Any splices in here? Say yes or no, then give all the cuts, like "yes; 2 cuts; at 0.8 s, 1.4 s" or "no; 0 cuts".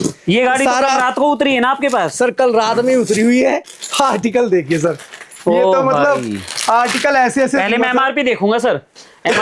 no; 0 cuts